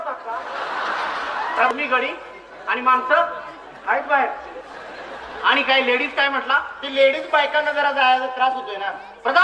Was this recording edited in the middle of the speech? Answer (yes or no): yes